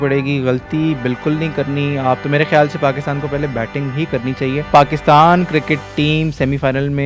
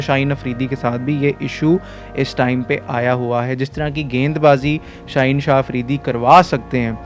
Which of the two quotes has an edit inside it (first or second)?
first